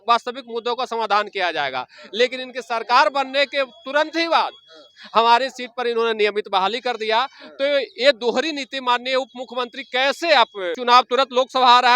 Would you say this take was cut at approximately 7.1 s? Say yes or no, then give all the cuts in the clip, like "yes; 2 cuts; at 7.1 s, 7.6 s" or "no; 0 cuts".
no; 1 cut; at 10.7 s